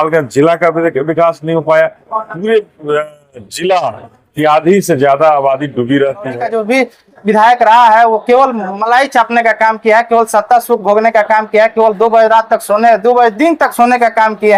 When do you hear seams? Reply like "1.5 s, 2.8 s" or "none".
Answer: 6.4 s